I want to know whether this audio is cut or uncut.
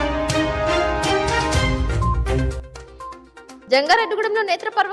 uncut